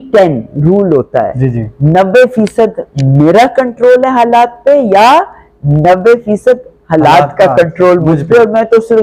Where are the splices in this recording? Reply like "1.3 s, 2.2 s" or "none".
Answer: none